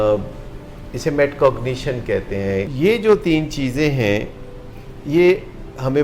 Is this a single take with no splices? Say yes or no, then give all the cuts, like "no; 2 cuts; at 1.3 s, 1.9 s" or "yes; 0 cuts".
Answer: no; 1 cut; at 2.7 s